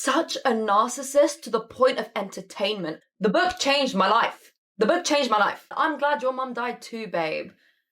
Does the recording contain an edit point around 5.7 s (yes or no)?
yes